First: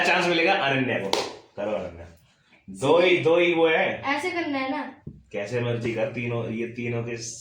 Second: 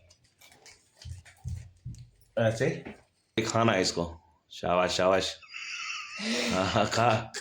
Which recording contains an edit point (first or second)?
second